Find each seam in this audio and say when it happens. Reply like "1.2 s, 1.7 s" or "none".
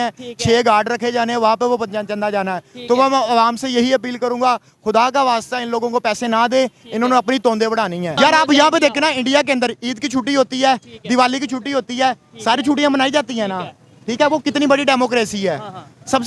8.1 s